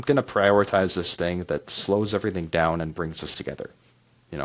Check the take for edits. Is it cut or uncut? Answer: uncut